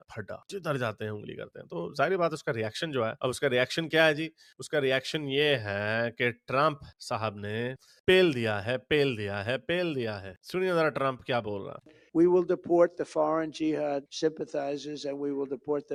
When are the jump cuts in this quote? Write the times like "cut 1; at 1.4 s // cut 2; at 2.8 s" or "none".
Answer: none